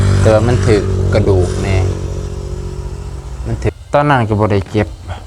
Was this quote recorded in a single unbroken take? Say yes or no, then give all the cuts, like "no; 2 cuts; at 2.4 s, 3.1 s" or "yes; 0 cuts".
no; 1 cut; at 3.7 s